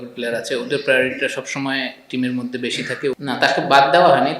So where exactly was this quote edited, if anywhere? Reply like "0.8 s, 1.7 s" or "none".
3.2 s